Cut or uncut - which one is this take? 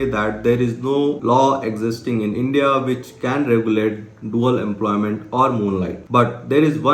uncut